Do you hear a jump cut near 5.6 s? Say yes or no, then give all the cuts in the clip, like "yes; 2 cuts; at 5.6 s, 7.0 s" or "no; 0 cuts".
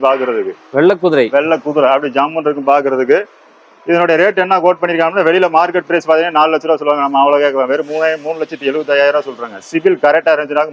no; 0 cuts